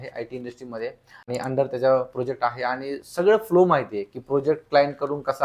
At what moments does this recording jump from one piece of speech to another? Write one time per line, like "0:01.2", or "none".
0:01.1